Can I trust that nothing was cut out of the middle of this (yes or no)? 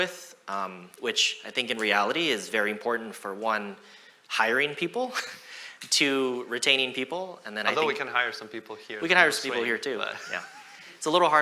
yes